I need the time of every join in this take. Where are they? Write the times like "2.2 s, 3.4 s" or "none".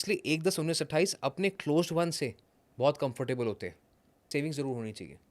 4.3 s